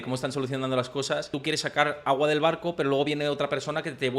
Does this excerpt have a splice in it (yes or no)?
yes